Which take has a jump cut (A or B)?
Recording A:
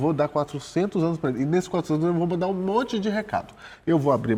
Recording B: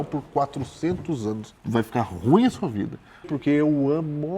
B